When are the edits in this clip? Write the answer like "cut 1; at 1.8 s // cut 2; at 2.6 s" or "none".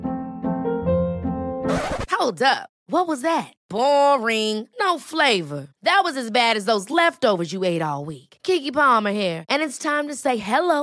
none